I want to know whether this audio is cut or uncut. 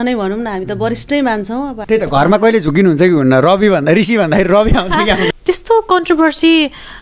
cut